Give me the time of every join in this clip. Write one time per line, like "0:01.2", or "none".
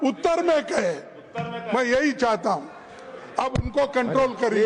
none